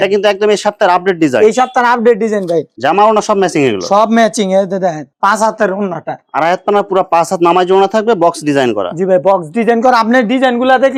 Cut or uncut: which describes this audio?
uncut